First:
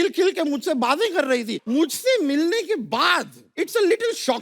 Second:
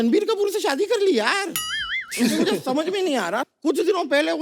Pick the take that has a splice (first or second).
first